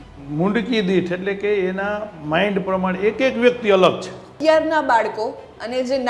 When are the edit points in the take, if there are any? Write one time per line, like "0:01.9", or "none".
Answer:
0:04.4